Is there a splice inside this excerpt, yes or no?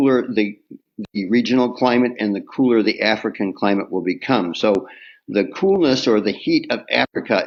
no